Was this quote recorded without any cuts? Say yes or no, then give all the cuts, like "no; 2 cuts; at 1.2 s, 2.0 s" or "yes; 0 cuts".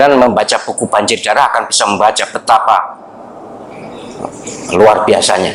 yes; 0 cuts